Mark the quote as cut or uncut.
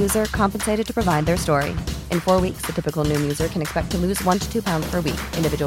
uncut